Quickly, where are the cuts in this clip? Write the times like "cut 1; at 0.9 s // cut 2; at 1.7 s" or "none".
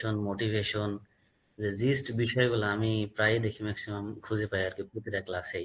none